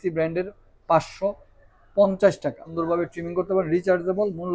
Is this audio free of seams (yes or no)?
no